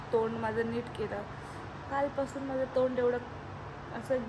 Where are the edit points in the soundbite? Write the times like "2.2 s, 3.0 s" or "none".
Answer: none